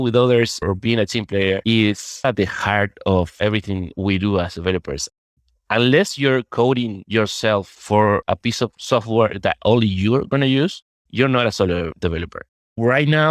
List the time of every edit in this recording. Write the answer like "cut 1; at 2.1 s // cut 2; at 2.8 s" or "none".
cut 1; at 2.2 s // cut 2; at 5.3 s